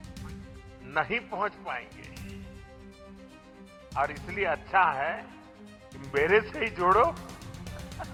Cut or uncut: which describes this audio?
uncut